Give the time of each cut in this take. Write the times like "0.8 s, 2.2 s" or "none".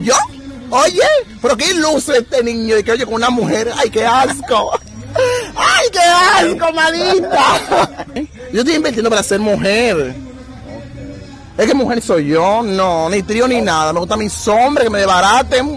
8.2 s